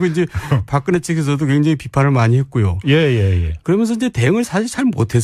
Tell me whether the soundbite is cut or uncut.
uncut